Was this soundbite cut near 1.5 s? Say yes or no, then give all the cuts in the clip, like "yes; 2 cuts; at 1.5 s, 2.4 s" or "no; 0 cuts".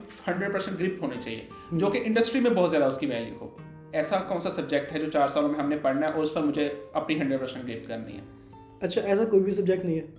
no; 0 cuts